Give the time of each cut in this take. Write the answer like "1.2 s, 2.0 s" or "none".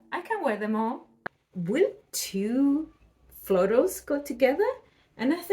1.2 s